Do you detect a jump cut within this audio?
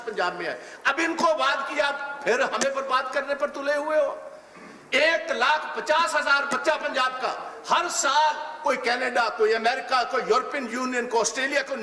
no; 0 cuts

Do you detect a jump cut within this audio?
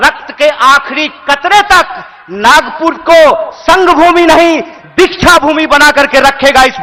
no; 0 cuts

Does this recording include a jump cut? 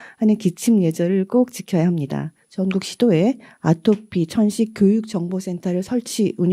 yes; 1 cut; at 2.4 s

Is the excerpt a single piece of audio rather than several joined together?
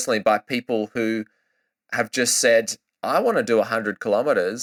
yes; 0 cuts

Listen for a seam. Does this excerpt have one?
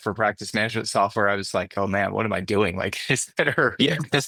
no; 0 cuts

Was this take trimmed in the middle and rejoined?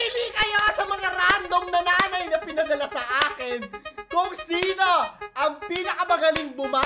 no; 0 cuts

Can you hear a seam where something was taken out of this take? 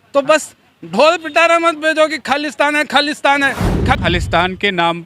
yes; 1 cut; at 4.0 s

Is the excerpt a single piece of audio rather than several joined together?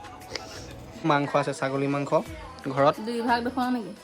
no; 1 cut; at 1.0 s

